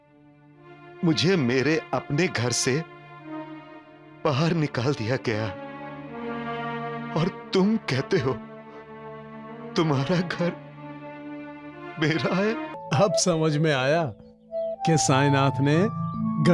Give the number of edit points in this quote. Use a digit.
1